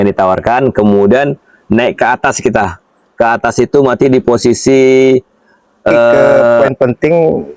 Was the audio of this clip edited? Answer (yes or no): yes